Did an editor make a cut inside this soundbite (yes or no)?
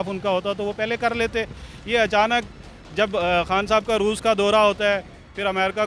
no